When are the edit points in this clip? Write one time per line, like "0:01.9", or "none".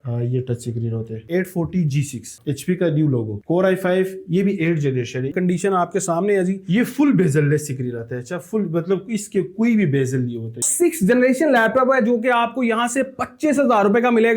0:01.2
0:05.3
0:10.7